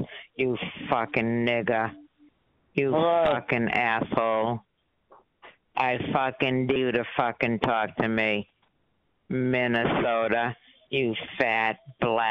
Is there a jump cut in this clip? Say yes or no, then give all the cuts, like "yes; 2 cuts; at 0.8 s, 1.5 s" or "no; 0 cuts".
no; 0 cuts